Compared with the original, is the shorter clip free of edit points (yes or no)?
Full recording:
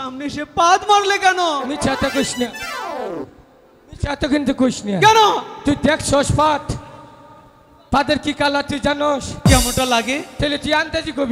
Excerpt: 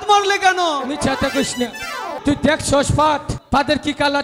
no